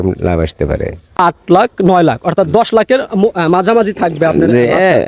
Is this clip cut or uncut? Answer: uncut